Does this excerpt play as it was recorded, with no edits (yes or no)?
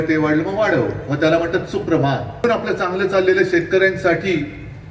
no